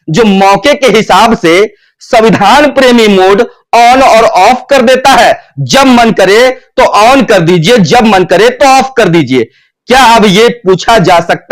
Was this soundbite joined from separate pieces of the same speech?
no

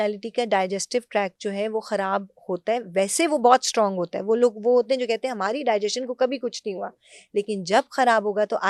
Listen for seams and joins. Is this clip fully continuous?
yes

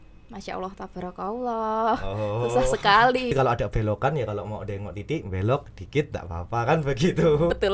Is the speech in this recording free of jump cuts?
no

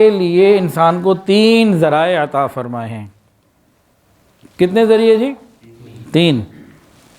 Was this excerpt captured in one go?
yes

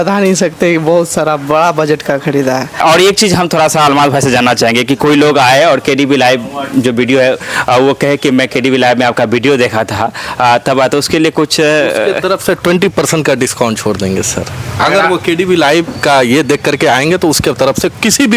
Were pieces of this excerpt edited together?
yes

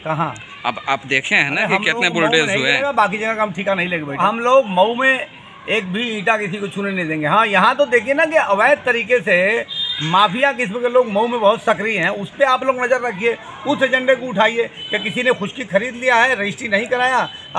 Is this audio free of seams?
no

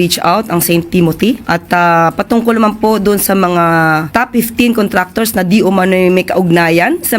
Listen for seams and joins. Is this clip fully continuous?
no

